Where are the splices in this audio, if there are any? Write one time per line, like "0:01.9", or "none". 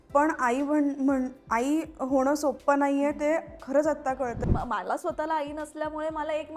0:04.4